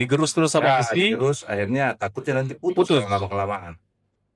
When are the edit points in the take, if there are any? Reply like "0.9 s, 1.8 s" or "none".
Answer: none